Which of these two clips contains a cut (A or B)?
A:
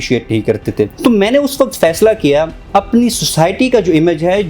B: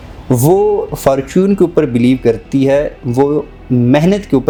A